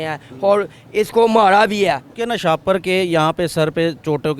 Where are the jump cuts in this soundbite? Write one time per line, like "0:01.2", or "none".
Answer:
0:02.1